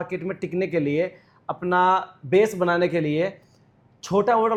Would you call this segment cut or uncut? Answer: uncut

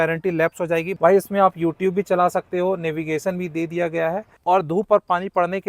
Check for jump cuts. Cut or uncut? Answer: cut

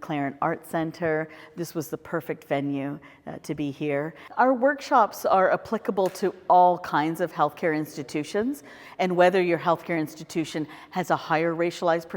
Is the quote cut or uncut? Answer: cut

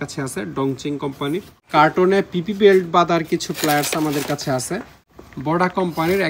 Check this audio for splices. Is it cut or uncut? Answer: cut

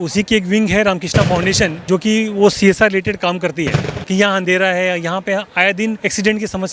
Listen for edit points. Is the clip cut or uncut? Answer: cut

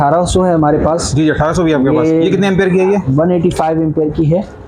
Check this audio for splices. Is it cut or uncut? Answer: uncut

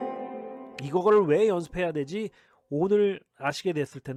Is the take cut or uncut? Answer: uncut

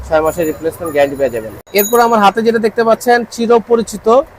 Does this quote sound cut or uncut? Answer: uncut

